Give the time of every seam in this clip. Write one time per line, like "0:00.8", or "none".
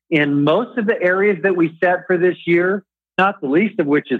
none